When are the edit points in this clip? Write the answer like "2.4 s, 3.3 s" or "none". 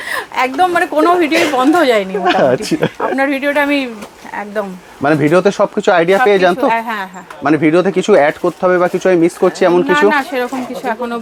none